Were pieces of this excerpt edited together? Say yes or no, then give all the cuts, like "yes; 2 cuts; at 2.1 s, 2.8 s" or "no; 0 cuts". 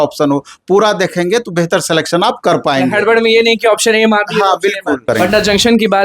yes; 1 cut; at 5.0 s